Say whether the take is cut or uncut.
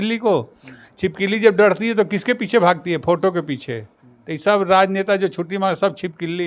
uncut